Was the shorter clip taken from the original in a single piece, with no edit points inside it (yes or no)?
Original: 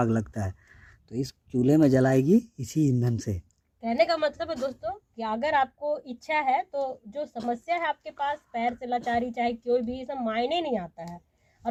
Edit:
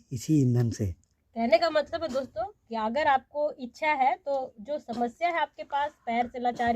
yes